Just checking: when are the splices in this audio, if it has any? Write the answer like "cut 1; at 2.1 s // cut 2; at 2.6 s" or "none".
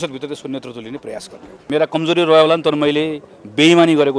cut 1; at 1.6 s